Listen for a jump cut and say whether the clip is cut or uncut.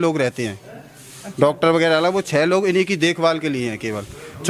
uncut